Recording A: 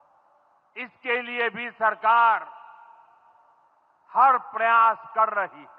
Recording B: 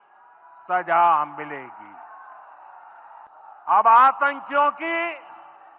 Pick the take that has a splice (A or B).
B